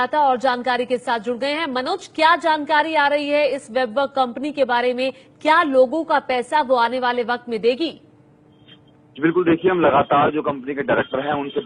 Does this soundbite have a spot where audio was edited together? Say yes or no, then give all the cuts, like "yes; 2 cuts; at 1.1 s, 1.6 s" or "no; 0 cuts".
no; 0 cuts